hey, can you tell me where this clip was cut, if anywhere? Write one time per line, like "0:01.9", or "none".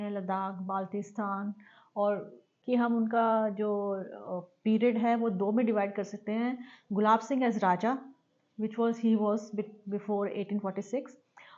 0:02.5